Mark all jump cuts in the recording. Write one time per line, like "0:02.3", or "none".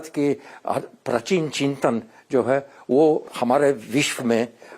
0:03.3